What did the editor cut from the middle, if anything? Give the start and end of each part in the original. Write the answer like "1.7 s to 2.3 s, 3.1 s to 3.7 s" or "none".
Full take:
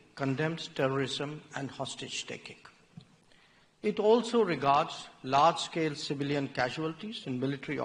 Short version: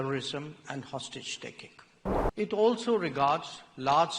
3.1 s to 3.7 s